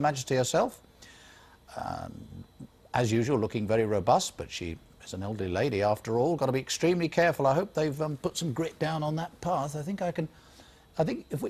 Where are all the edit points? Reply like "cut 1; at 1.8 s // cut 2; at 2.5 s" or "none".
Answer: cut 1; at 4.0 s